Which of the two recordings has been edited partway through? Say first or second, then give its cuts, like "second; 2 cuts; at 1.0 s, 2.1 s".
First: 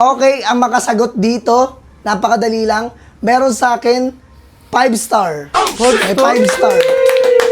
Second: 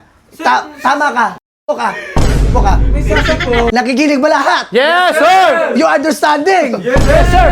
second; 1 cut; at 3.7 s